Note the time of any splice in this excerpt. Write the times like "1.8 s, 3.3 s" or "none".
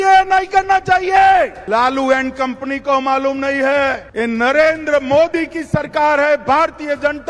1.6 s, 4.0 s